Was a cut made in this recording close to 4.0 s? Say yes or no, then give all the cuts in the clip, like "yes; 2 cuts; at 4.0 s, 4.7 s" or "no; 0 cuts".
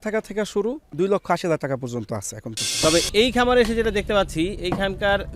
no; 2 cuts; at 0.8 s, 2.6 s